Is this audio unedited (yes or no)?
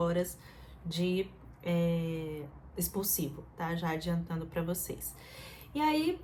yes